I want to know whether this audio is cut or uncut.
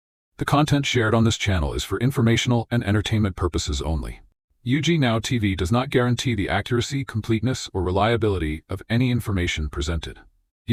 uncut